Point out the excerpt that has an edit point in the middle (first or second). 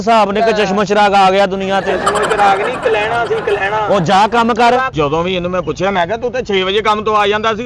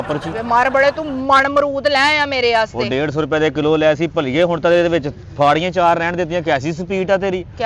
first